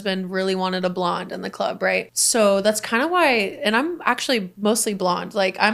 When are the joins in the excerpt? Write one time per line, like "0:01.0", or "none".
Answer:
0:02.0
0:04.5